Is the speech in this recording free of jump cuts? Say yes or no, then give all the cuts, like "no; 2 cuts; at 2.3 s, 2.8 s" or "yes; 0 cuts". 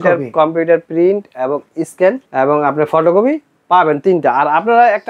yes; 0 cuts